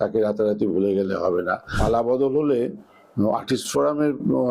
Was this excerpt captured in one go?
no; 1 cut; at 1.6 s

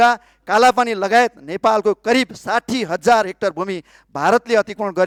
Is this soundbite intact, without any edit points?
yes; 0 cuts

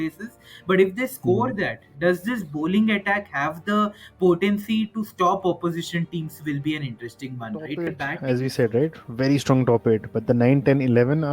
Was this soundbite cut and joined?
yes; 1 cut; at 7.9 s

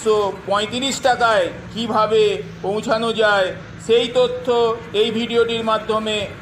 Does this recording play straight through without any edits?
yes; 0 cuts

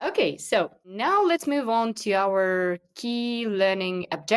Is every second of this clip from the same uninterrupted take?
yes; 0 cuts

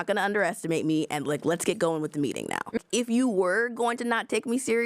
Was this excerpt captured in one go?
no; 1 cut; at 2.7 s

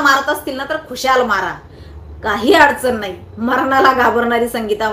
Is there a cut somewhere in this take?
no; 0 cuts

